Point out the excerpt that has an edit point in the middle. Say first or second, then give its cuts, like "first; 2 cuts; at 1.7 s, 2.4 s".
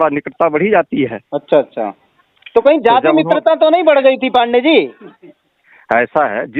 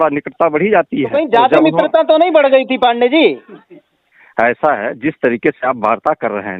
second; 1 cut; at 1.1 s